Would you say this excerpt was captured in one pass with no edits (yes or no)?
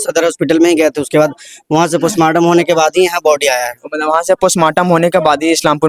yes